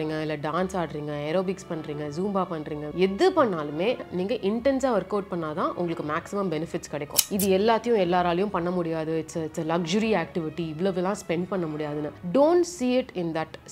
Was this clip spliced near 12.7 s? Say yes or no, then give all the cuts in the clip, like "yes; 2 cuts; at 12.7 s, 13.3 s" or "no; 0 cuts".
no; 3 cuts; at 2.9 s, 4.0 s, 7.2 s